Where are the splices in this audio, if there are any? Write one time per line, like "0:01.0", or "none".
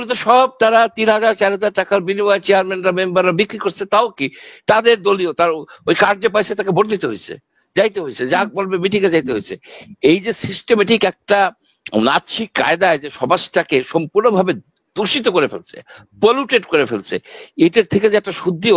none